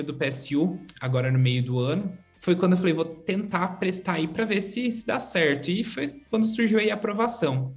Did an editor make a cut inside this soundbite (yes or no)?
yes